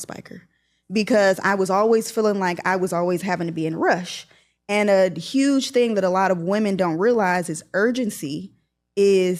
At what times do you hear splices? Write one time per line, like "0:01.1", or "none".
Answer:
none